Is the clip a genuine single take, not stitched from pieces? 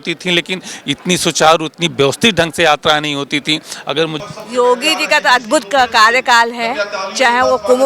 no; 1 cut; at 4.2 s

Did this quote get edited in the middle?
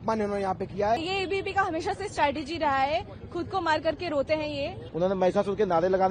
yes; 2 cuts; at 1.0 s, 4.8 s

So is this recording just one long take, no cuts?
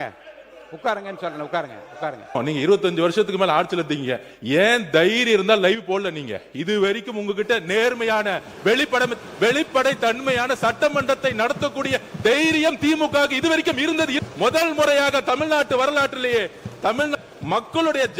no; 3 cuts; at 2.4 s, 14.1 s, 17.1 s

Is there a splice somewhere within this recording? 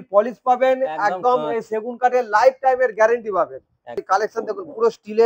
yes; 1 cut; at 4.0 s

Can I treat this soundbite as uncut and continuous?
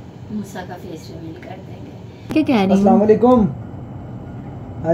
no; 1 cut; at 2.3 s

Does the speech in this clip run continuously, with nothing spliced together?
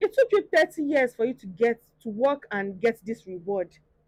yes; 0 cuts

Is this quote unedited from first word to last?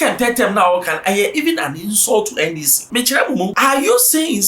no; 2 cuts; at 2.7 s, 3.5 s

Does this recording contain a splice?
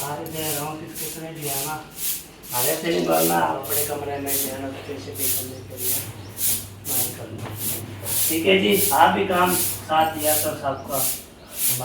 yes; 2 cuts; at 3.6 s, 7.7 s

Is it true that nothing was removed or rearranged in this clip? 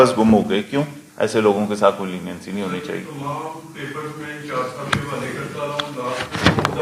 no; 1 cut; at 1.0 s

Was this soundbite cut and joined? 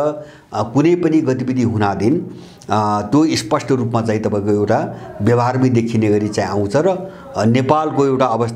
no; 0 cuts

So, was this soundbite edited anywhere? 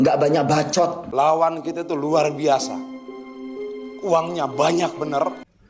yes; 1 cut; at 1.0 s

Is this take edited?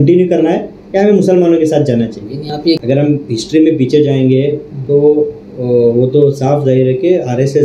yes; 1 cut; at 2.8 s

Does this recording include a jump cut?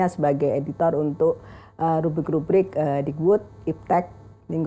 no; 0 cuts

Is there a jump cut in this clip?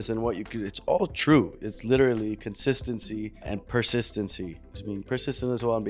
yes; 1 cut; at 4.7 s

